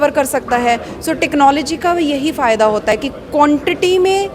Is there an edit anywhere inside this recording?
no; 0 cuts

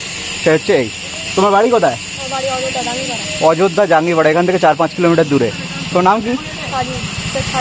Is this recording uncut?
yes; 0 cuts

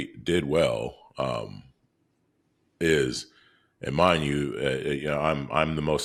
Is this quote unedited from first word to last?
yes; 0 cuts

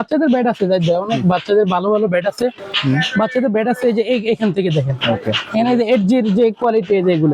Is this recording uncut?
yes; 0 cuts

